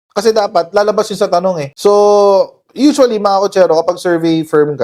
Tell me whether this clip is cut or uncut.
cut